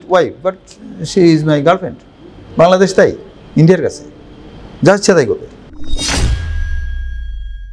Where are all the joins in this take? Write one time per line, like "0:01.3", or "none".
none